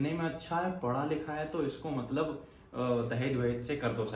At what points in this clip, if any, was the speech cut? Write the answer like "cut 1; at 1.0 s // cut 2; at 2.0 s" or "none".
none